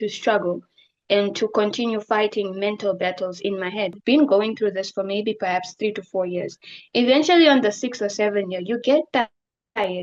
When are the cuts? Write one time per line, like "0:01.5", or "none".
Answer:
0:04.0